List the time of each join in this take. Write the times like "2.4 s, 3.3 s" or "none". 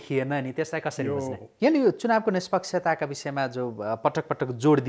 1.4 s